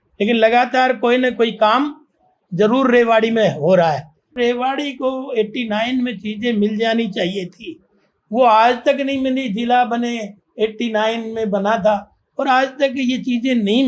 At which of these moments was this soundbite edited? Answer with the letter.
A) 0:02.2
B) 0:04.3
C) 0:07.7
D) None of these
B